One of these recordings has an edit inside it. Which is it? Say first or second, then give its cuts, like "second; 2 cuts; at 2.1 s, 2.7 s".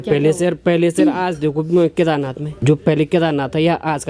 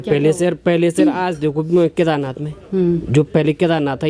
first; 1 cut; at 2.6 s